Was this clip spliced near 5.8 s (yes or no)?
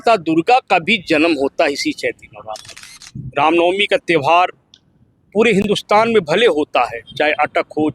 no